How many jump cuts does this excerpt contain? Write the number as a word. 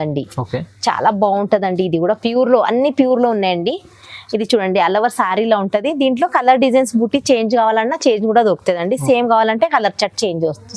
zero